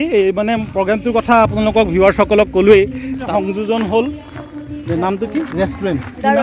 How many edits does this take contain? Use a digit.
1